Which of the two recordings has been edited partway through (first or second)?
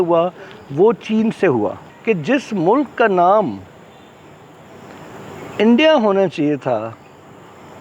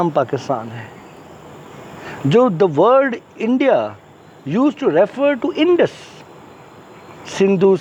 first